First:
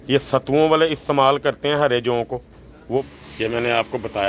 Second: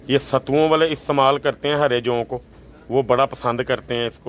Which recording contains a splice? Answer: first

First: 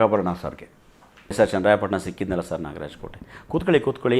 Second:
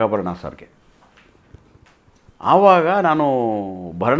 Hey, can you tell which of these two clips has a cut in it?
first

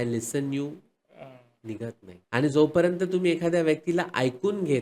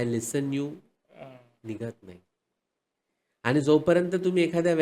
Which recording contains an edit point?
first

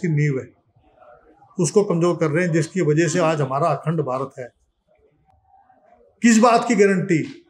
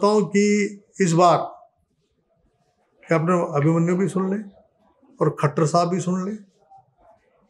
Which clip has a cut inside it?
first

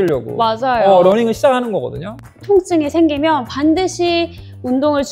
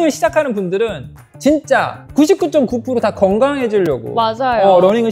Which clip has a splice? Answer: first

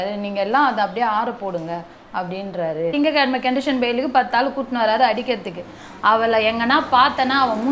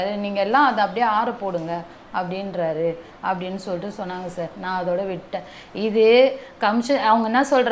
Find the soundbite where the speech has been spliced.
first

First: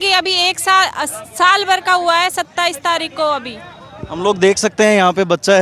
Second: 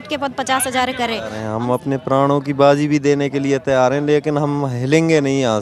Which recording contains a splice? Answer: second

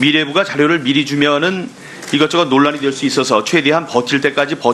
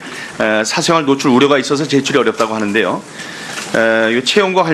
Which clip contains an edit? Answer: second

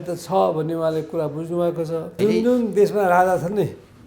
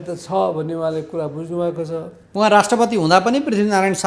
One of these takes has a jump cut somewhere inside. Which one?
first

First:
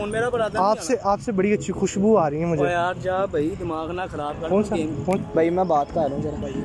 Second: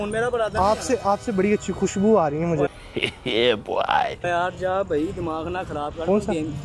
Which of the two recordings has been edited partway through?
first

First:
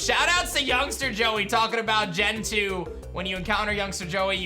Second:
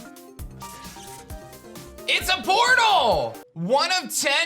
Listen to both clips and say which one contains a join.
second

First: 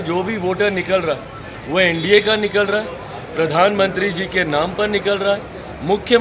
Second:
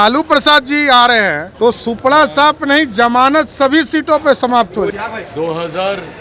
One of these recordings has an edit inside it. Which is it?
second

